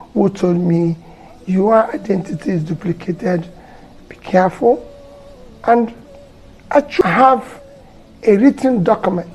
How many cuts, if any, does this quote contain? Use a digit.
1